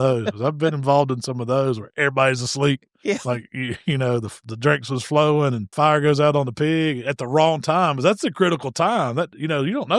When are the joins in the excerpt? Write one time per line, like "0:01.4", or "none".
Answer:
0:05.6